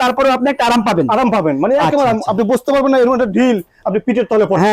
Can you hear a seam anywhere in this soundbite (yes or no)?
no